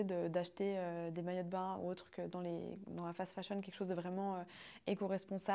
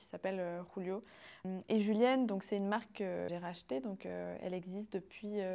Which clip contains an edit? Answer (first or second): second